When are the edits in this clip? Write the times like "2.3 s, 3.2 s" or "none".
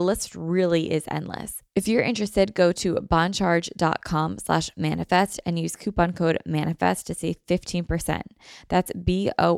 1.5 s